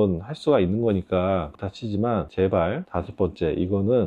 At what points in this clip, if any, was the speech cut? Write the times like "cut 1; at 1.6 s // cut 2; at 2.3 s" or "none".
none